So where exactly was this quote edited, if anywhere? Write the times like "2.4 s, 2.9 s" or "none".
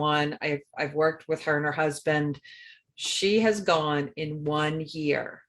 2.8 s